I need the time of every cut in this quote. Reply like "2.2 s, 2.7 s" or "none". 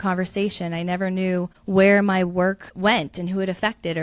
1.6 s, 2.7 s